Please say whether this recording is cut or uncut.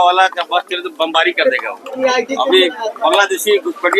cut